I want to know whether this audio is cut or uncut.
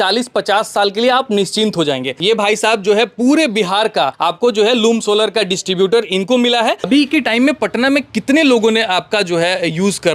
cut